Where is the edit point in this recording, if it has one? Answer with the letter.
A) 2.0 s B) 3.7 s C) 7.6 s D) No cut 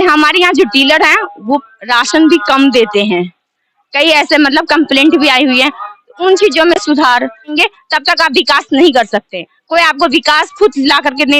C